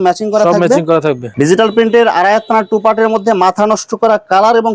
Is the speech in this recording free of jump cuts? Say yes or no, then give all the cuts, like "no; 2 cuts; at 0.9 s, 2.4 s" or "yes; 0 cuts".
no; 1 cut; at 1.3 s